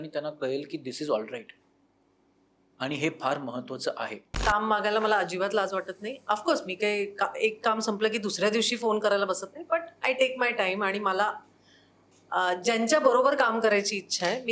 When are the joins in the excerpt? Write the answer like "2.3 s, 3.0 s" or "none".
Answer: 4.3 s